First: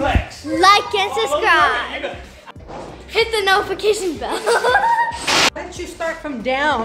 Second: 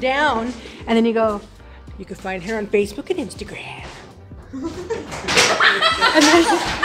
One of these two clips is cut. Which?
first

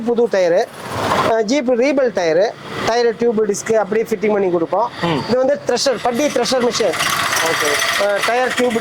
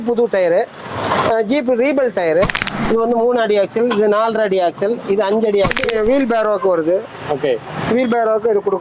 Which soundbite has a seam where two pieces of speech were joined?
second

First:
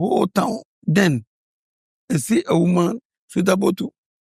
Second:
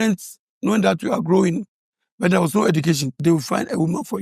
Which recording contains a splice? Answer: second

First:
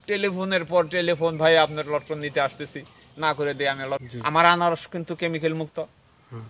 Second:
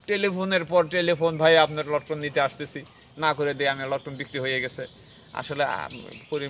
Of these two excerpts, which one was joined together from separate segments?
first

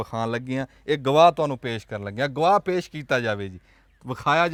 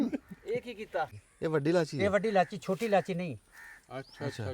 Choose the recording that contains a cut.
second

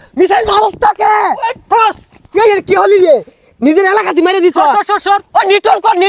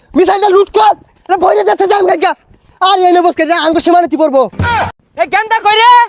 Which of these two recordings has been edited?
second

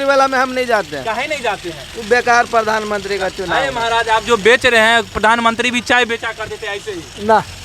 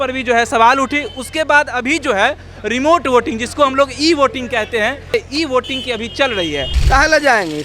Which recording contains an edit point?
second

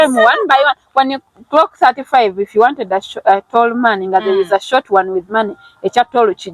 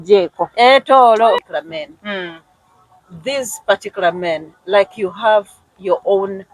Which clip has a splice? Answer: second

